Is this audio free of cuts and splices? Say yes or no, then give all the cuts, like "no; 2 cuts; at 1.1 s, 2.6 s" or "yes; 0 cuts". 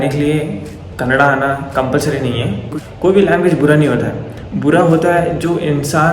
no; 1 cut; at 2.7 s